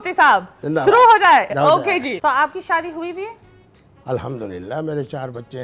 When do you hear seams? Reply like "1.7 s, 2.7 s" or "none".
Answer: 2.1 s